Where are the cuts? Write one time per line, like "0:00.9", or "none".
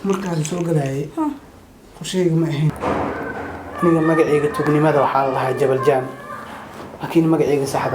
0:02.8